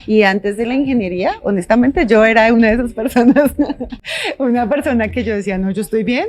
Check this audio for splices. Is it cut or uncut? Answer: uncut